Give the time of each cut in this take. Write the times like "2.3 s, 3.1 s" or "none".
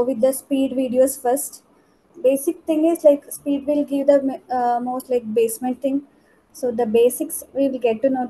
2.0 s